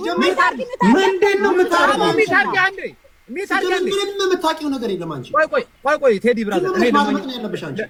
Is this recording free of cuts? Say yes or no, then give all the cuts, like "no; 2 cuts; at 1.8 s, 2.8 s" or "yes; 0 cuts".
yes; 0 cuts